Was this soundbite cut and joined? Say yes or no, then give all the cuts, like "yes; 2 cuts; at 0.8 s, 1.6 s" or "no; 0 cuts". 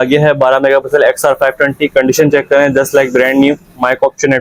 no; 0 cuts